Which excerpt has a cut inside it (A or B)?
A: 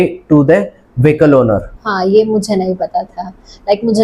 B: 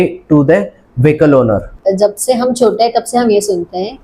B